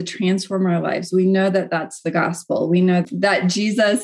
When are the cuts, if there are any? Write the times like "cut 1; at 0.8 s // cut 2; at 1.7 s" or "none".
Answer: cut 1; at 3.0 s